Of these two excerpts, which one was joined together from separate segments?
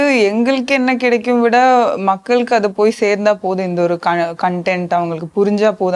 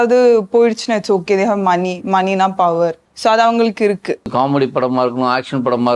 second; 2 cuts; at 3.1 s, 4.3 s

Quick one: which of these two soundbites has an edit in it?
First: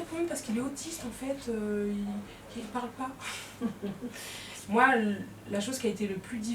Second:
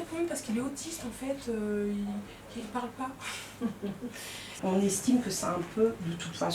second; 1 cut; at 4.5 s

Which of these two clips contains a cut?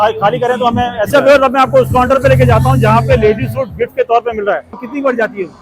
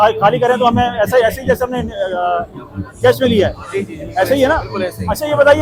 first; 2 cuts; at 1.1 s, 4.8 s

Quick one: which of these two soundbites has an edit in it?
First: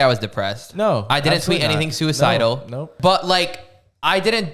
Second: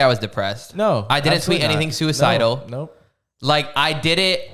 first; 1 cut; at 2.9 s

